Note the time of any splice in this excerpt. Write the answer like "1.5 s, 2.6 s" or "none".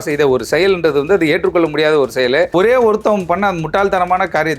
2.5 s